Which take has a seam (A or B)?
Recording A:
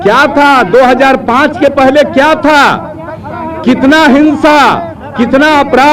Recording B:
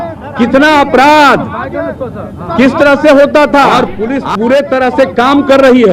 B